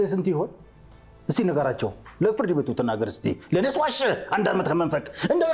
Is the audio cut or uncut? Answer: uncut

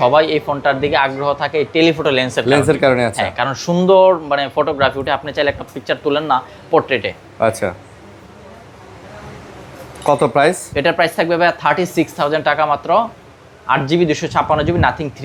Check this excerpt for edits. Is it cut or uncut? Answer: uncut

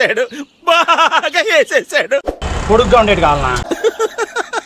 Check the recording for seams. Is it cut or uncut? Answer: cut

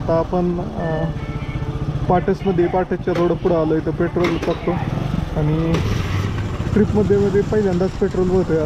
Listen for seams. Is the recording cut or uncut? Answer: uncut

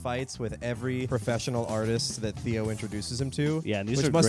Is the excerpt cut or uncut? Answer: cut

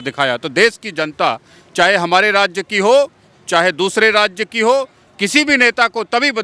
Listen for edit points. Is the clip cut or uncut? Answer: uncut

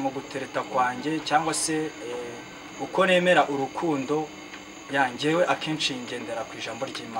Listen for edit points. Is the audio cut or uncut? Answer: uncut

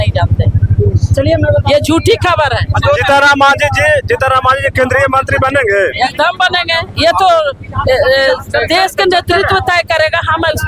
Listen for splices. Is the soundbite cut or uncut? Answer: uncut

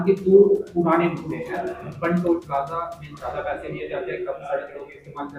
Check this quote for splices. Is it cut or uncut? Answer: uncut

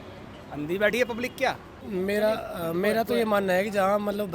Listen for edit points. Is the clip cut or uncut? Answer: cut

